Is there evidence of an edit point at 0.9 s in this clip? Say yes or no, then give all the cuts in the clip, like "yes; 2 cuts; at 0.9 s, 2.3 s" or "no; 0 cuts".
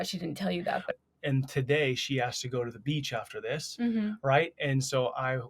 yes; 1 cut; at 0.9 s